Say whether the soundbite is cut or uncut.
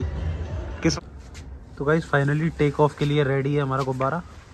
cut